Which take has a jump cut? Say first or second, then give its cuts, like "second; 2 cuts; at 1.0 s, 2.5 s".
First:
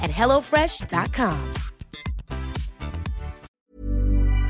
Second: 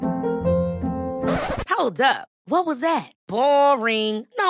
first; 1 cut; at 3.5 s